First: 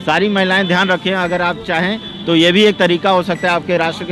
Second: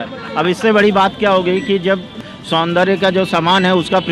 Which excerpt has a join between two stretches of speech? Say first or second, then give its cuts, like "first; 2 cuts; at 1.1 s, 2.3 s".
second; 1 cut; at 2.2 s